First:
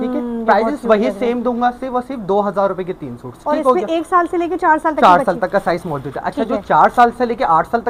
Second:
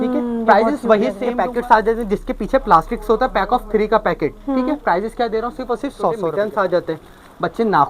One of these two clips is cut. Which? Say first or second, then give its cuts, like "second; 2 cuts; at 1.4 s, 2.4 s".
second; 2 cuts; at 1.2 s, 6.3 s